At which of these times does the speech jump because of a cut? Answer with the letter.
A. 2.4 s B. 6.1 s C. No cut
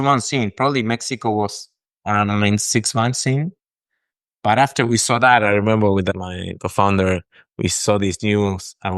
B